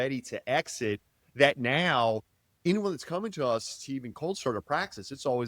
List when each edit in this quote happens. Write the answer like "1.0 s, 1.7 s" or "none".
2.6 s